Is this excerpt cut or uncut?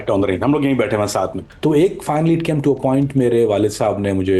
cut